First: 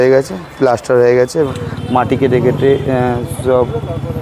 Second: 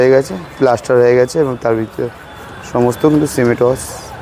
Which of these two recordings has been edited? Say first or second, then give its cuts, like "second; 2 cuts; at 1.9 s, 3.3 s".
first; 1 cut; at 1.6 s